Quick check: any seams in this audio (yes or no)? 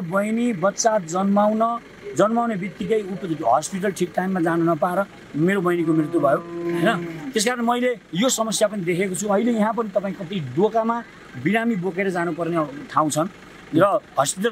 no